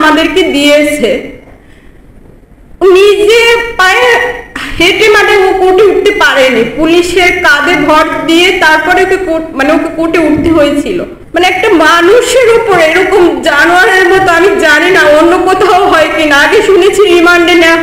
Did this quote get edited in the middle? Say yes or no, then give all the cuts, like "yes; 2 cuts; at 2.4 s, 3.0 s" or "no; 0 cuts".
yes; 1 cut; at 11.2 s